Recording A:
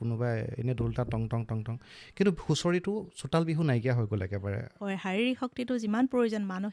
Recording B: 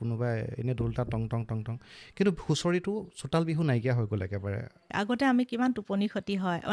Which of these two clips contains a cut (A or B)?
A